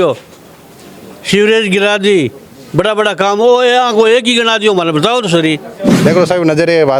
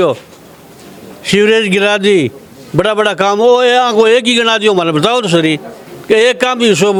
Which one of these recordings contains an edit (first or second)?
first